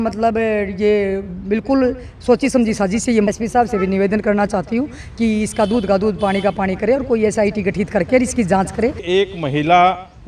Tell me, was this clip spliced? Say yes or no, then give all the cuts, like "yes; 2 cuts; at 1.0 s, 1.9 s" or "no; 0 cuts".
yes; 2 cuts; at 3.3 s, 9.0 s